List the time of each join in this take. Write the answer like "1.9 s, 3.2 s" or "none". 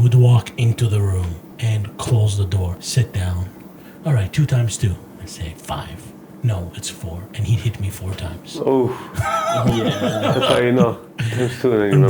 1.5 s, 2.7 s